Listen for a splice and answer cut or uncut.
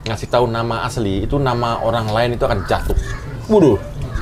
cut